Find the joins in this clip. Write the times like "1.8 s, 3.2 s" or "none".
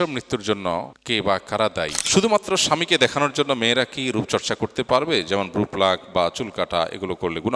1.0 s, 2.0 s